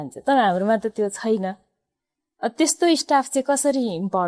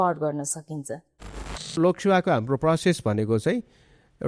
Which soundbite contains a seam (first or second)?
second